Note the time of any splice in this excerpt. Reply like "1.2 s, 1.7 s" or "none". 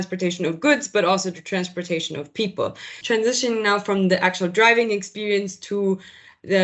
2.9 s